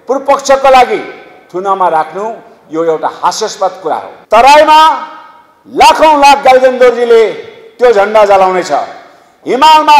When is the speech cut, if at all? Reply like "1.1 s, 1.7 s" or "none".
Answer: 4.1 s